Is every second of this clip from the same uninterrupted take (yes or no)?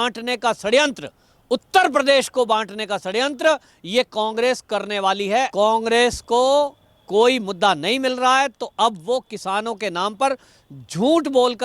no